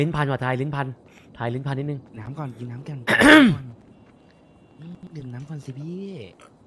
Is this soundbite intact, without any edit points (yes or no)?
yes